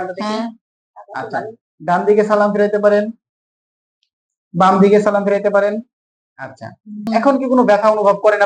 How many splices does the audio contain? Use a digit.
1